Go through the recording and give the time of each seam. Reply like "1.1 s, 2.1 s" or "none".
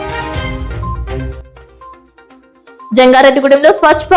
none

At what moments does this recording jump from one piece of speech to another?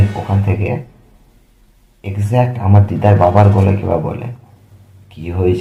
none

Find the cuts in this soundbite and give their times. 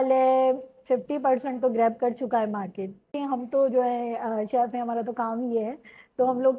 3.1 s

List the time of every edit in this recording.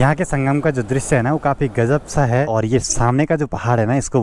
2.5 s

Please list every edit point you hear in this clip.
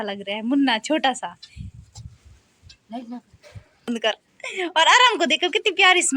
3.9 s

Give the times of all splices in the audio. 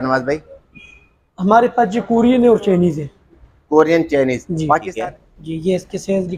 4.9 s

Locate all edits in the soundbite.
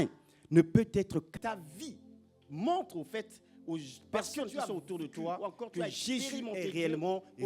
1.3 s

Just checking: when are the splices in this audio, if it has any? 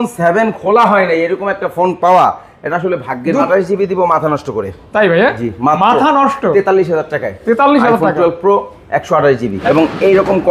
3.5 s, 9.6 s

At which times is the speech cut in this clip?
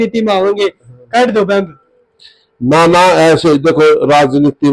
none

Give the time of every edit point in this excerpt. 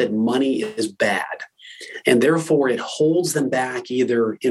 none

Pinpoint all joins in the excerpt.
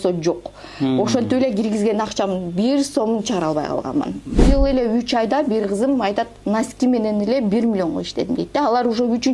4.4 s

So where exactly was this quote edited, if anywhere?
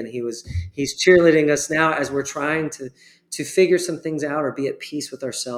none

